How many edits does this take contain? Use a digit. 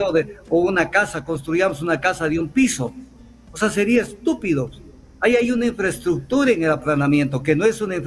0